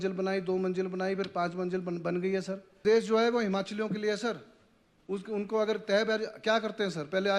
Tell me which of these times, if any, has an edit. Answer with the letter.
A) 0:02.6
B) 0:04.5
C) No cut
A